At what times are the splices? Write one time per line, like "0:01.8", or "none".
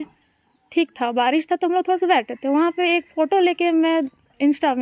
none